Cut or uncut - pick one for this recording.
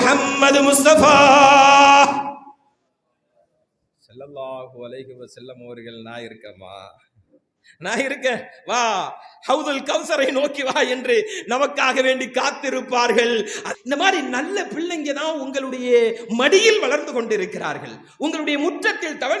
cut